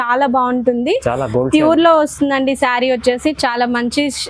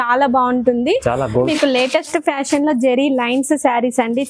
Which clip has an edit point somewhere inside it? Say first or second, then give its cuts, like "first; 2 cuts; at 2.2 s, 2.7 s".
second; 1 cut; at 1.2 s